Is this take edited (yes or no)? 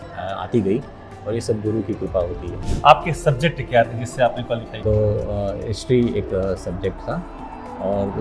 yes